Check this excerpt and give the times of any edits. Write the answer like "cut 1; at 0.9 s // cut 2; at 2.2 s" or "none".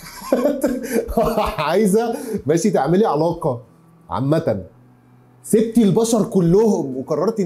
none